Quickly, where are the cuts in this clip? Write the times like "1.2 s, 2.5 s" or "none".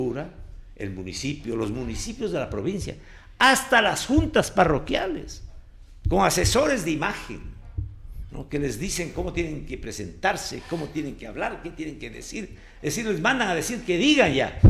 none